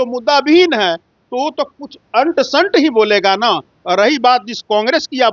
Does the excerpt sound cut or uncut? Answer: uncut